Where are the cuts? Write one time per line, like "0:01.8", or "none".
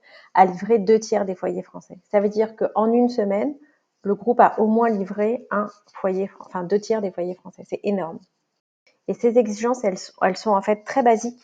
0:08.5